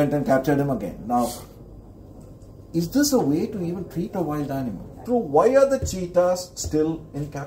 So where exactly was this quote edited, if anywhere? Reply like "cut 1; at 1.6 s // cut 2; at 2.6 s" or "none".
cut 1; at 5.0 s